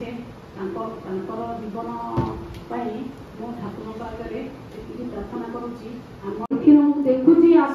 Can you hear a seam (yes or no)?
yes